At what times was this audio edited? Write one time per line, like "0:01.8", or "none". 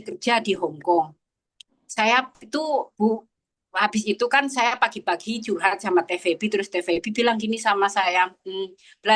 none